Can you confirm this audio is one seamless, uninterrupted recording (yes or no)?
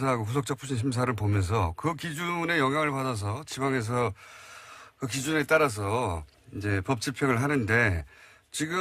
no